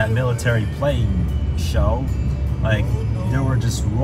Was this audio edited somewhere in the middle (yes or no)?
no